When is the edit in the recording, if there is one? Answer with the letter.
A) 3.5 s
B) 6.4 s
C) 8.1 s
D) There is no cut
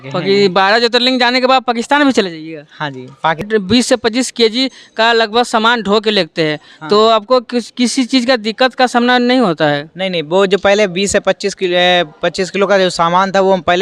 A